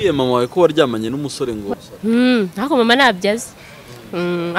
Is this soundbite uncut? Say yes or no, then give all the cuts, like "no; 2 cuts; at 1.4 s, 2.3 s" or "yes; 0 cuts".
no; 1 cut; at 1.7 s